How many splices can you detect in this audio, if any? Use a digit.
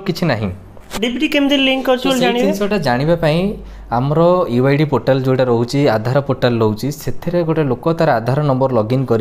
0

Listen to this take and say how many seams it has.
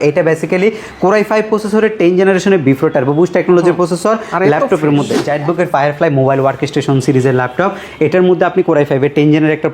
1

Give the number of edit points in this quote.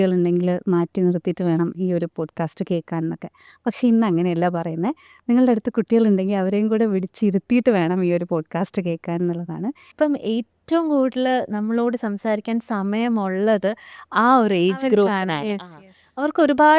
1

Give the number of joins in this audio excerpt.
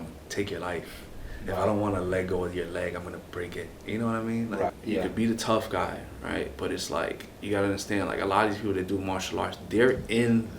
2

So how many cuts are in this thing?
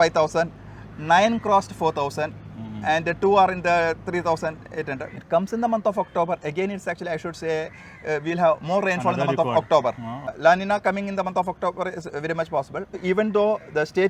3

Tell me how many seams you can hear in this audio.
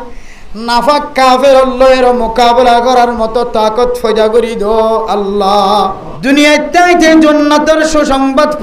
1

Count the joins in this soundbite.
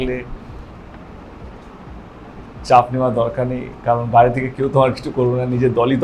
0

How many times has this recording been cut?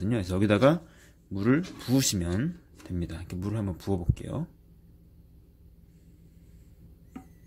0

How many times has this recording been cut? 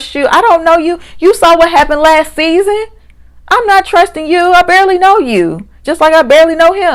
0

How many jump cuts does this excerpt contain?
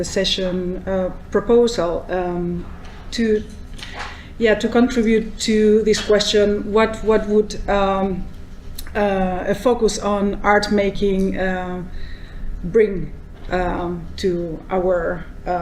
1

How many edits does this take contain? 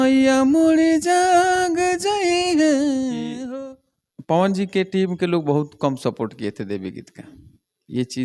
1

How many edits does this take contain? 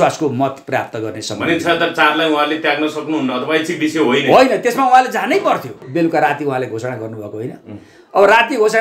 1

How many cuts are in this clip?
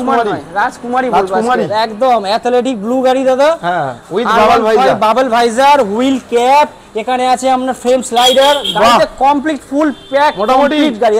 0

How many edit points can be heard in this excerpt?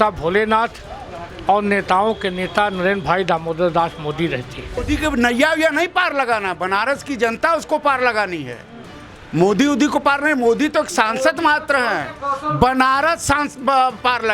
1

